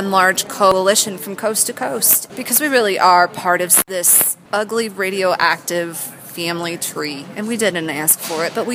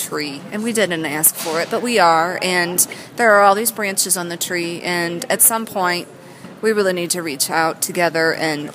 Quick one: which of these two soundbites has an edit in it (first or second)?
first